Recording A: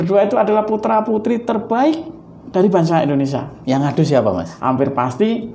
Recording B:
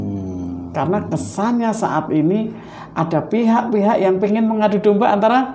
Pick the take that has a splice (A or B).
A